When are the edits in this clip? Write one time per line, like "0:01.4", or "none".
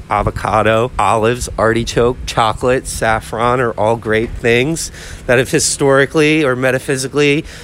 none